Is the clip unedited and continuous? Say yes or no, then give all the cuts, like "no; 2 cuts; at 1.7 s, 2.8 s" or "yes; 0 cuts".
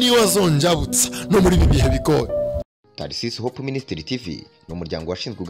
no; 1 cut; at 2.7 s